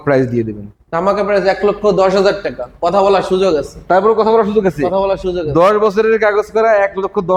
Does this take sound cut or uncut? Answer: uncut